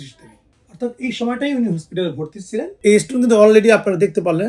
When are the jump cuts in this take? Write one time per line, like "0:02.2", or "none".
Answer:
0:02.7